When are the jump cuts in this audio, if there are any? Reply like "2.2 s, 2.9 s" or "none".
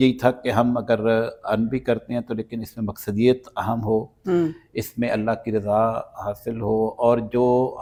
none